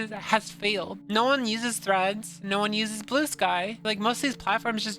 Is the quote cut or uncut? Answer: cut